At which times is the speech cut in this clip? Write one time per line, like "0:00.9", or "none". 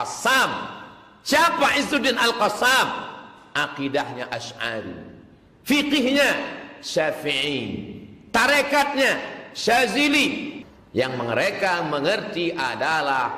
0:10.5